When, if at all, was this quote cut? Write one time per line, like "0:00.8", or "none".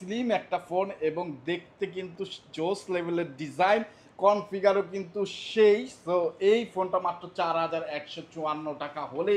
none